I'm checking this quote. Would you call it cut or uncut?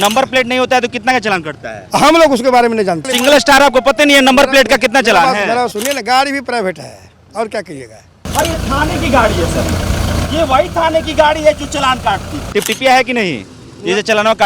cut